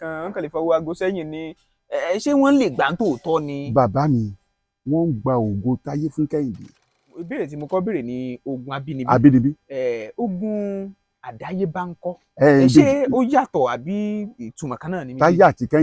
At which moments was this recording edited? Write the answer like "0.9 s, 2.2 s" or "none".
7.3 s